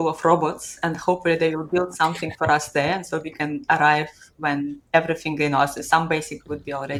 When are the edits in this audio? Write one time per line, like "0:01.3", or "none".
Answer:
none